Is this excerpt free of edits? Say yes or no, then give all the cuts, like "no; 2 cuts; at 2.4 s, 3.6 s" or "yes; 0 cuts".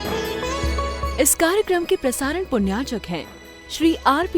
no; 1 cut; at 1.1 s